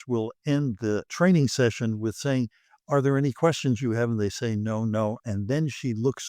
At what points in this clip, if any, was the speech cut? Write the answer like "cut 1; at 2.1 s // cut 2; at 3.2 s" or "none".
cut 1; at 1.1 s